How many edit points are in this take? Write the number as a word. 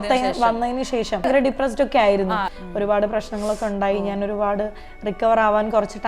two